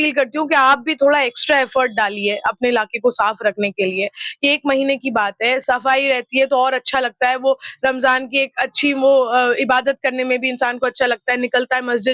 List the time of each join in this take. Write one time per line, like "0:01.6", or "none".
none